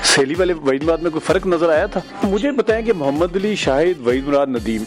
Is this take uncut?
no; 1 cut; at 2.1 s

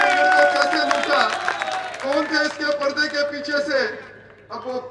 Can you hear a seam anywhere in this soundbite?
no; 0 cuts

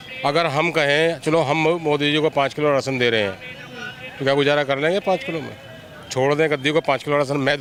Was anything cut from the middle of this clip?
no; 0 cuts

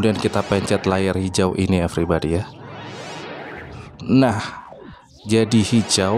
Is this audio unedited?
yes; 0 cuts

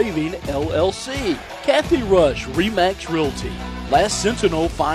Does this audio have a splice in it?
yes; 1 cut; at 1.5 s

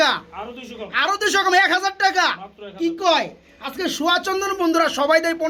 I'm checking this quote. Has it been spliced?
no; 0 cuts

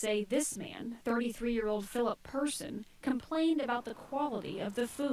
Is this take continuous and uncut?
yes; 0 cuts

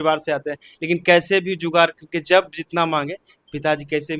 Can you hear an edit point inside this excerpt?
no; 0 cuts

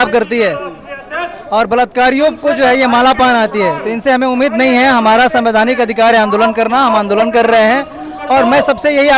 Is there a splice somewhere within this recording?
no; 0 cuts

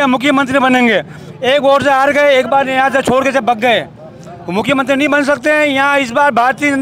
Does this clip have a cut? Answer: no; 0 cuts

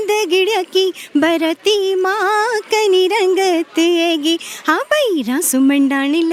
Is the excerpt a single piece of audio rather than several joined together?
yes; 0 cuts

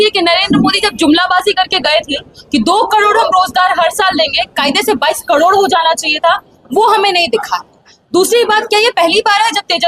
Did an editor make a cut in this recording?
no; 0 cuts

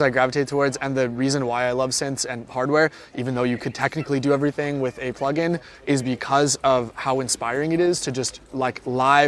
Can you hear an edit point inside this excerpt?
no; 0 cuts

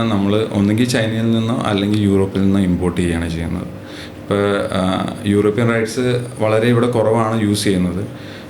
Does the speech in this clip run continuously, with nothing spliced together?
yes; 0 cuts

